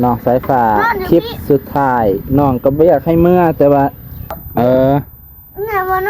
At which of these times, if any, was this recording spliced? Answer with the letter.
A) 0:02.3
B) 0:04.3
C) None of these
B